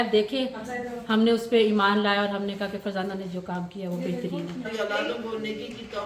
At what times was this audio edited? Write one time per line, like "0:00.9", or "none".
0:04.7